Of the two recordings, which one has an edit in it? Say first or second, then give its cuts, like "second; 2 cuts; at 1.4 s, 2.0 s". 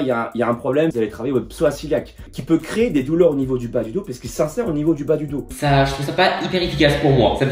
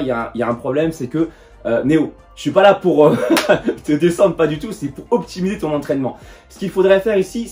first; 3 cuts; at 0.9 s, 2.3 s, 5.5 s